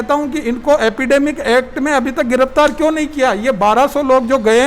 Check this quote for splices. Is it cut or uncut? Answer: uncut